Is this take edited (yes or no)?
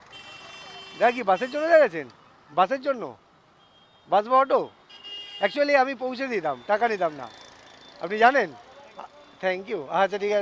no